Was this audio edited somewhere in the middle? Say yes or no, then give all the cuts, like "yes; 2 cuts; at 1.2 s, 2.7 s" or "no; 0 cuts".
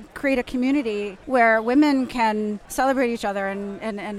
yes; 2 cuts; at 1.1 s, 2.6 s